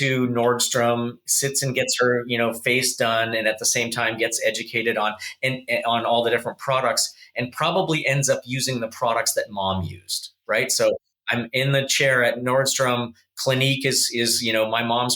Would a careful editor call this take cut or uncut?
uncut